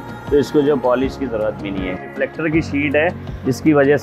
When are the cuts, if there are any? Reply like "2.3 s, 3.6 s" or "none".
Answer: 2.1 s